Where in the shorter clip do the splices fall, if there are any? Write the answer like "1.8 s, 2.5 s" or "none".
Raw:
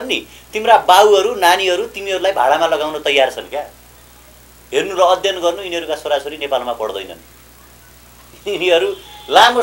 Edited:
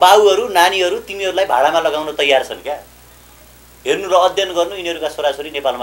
none